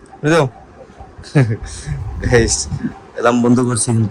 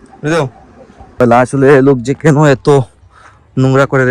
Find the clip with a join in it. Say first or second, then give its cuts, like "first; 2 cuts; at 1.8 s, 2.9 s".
second; 1 cut; at 1.2 s